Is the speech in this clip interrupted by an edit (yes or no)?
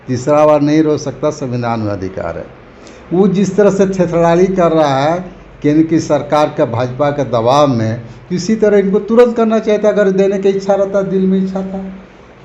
no